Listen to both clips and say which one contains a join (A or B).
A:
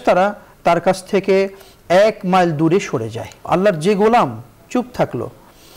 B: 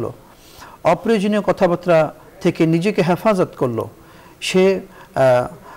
A